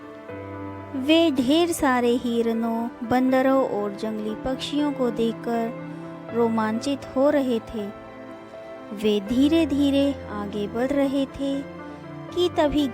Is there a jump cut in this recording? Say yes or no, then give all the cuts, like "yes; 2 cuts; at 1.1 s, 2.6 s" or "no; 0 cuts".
yes; 1 cut; at 0.9 s